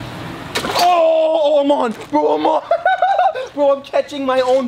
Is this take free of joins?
yes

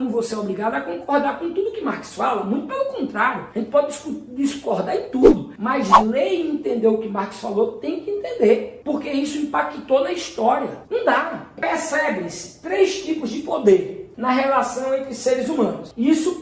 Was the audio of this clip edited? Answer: yes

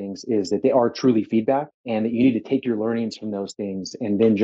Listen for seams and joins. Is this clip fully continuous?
no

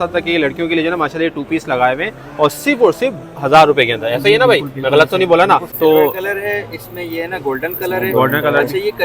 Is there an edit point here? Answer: yes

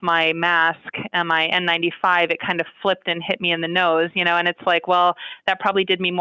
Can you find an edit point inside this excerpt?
no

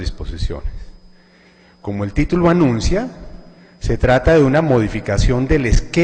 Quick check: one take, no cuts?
yes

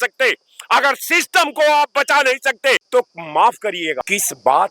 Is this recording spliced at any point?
yes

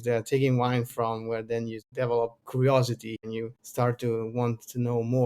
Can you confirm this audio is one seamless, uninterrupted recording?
no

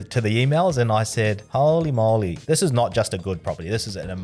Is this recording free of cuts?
no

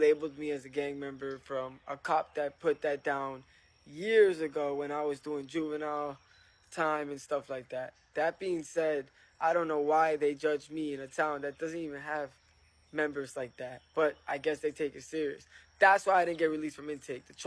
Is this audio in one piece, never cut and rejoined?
yes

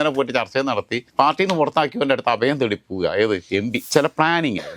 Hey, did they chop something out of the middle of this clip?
yes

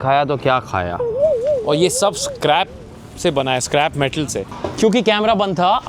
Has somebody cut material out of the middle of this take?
yes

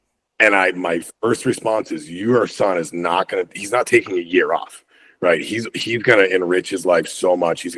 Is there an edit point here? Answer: no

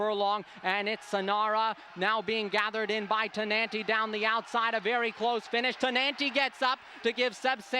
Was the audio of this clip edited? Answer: no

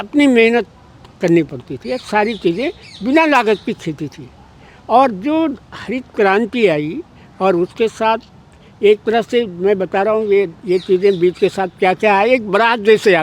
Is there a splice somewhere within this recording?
no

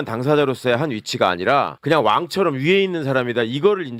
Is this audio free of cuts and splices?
no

